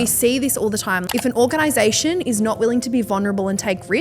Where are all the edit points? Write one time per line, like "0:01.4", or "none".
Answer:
0:01.0